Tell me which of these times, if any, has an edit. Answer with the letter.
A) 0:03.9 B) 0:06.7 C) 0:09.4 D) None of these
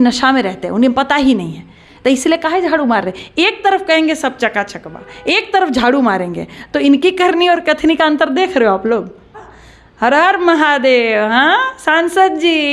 C